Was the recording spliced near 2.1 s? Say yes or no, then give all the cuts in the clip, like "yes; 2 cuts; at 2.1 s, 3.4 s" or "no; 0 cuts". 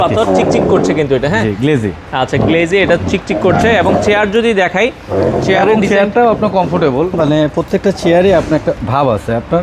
no; 0 cuts